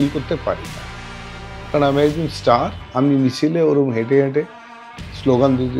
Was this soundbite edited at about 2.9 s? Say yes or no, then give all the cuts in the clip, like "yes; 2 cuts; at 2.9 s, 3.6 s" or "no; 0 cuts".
no; 0 cuts